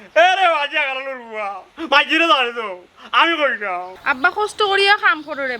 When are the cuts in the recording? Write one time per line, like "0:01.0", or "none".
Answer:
0:04.0